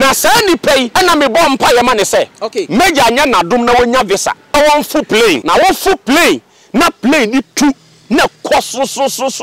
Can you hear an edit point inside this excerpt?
yes; 3 cuts; at 0.9 s, 4.5 s, 5.4 s

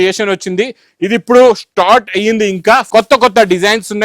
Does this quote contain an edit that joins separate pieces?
yes; 1 cut; at 2.9 s

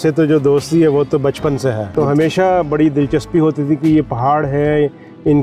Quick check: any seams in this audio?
yes; 1 cut; at 1.9 s

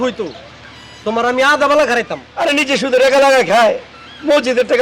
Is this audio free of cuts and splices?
no; 1 cut; at 2.2 s

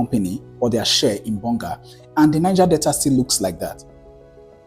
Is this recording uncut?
no; 1 cut; at 3.8 s

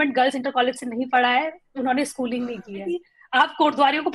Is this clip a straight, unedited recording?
no; 1 cut; at 3.1 s

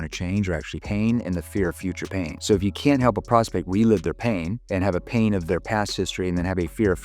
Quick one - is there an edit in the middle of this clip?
no; 0 cuts

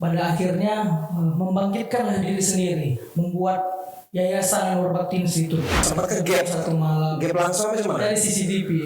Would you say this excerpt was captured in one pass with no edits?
no; 1 cut; at 5.7 s

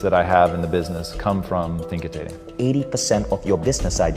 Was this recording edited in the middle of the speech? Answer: yes; 1 cut; at 2.5 s

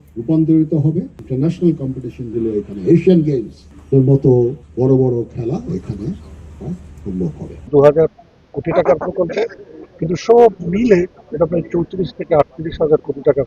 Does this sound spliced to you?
yes; 2 cuts; at 4.6 s, 7.7 s

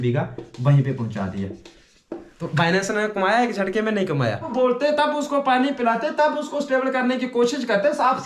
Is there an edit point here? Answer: yes; 1 cut; at 4.5 s

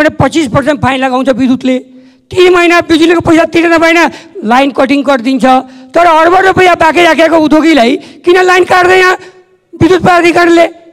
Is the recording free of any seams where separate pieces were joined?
yes; 0 cuts

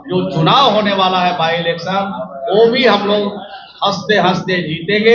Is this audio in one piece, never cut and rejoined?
yes; 0 cuts

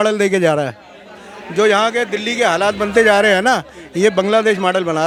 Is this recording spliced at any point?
no; 0 cuts

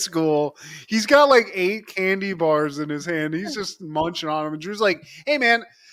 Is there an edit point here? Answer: no; 0 cuts

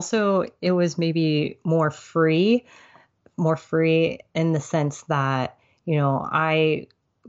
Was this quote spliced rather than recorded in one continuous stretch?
no; 0 cuts

